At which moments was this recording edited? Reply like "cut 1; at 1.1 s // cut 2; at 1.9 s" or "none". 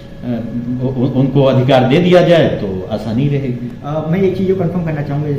none